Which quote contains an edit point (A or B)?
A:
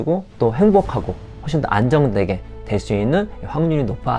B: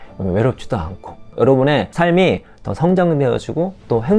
B